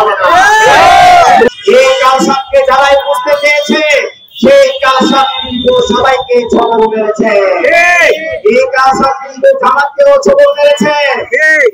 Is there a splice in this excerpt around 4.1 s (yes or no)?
no